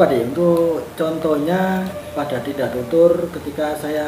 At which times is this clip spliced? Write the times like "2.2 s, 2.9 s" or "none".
2.0 s